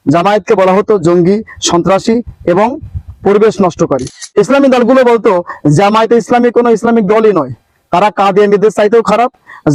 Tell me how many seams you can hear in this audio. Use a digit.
0